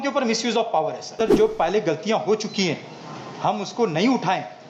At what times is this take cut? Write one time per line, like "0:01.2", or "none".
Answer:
0:01.2